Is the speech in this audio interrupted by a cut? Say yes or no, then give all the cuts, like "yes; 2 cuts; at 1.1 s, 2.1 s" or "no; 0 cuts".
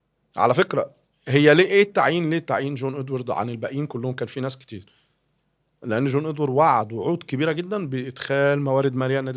no; 0 cuts